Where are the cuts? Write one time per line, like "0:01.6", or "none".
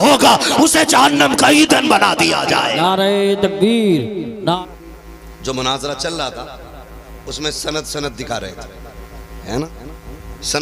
0:04.6